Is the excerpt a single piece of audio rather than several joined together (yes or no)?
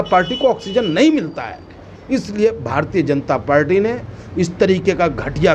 yes